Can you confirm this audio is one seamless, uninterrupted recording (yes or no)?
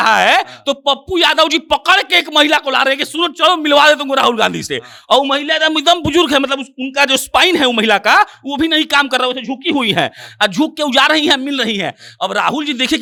yes